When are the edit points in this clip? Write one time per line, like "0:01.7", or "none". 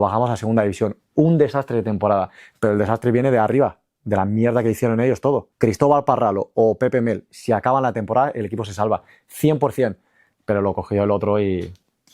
0:05.5